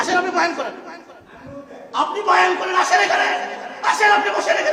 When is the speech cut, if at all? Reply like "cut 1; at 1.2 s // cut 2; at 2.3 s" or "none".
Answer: none